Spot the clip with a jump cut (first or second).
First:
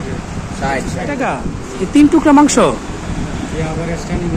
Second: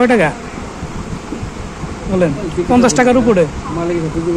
first